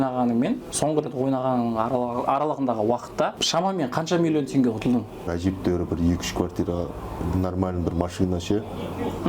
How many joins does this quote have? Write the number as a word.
two